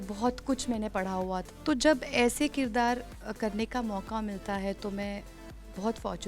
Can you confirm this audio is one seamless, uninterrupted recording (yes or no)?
no